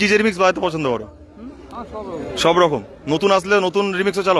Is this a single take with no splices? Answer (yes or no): yes